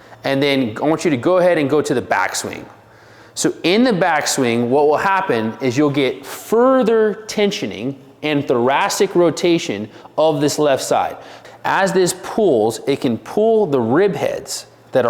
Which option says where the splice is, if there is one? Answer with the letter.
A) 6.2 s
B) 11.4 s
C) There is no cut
B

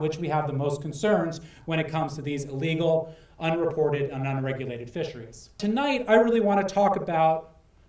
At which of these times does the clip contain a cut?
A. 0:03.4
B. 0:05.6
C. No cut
B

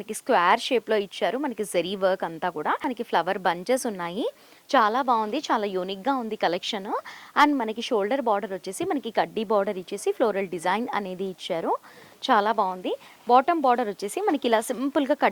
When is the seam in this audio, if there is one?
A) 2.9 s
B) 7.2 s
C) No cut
A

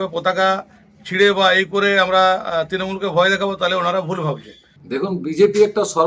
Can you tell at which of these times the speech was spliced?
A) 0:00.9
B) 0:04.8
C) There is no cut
B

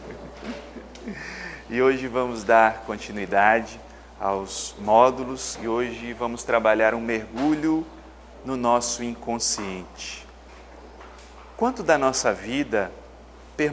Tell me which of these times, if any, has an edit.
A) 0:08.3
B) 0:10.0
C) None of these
A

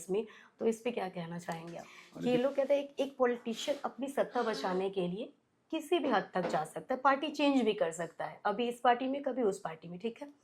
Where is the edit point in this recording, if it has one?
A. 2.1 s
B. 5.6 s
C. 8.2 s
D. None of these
A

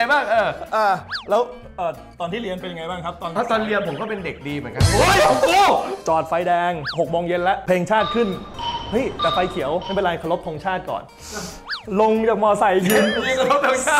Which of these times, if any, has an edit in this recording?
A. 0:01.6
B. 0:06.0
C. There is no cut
B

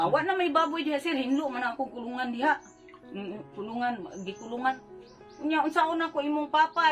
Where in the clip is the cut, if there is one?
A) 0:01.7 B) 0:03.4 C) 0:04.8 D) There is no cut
C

